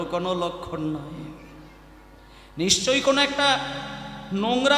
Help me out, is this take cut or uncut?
uncut